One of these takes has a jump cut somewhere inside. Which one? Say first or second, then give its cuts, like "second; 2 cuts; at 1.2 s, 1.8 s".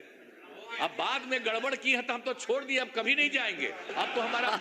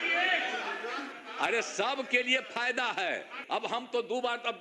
second; 2 cuts; at 1.1 s, 3.4 s